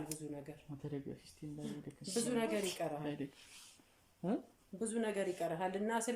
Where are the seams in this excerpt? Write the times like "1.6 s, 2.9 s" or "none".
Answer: none